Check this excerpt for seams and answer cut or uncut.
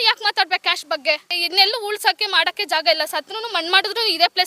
cut